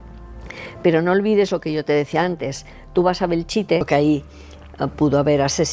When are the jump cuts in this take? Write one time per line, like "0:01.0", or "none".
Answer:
0:03.9